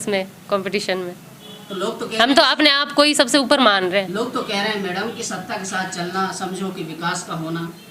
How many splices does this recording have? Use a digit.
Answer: 0